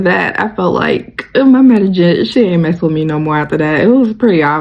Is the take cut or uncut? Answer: uncut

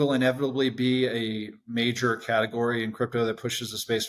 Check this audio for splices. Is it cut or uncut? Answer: uncut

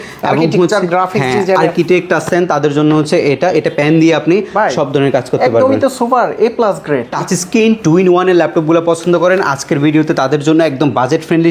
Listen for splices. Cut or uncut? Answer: cut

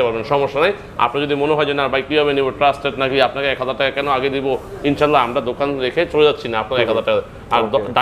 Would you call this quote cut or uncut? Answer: uncut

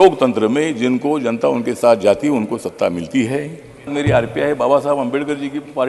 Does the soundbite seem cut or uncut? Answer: cut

